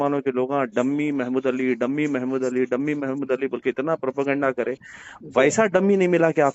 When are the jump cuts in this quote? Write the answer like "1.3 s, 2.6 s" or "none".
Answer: none